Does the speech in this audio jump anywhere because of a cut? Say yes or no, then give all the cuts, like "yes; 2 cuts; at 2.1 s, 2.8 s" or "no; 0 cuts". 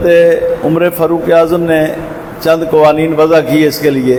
no; 0 cuts